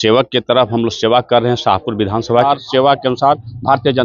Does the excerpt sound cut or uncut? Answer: cut